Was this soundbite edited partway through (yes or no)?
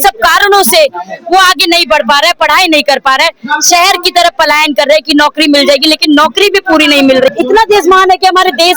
yes